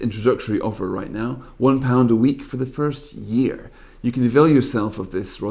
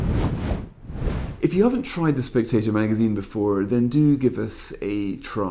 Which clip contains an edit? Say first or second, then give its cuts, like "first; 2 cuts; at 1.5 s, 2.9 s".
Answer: second; 1 cut; at 1.3 s